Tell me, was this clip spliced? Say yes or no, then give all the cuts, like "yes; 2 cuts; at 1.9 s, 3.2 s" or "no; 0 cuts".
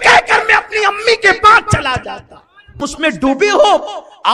yes; 1 cut; at 2.8 s